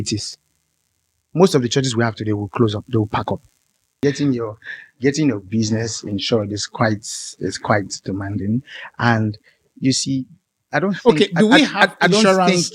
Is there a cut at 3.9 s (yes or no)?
yes